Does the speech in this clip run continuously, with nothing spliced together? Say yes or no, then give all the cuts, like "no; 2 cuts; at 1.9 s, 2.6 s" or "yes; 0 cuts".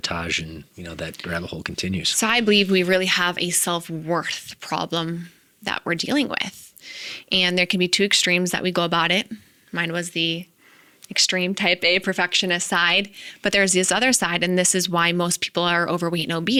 yes; 0 cuts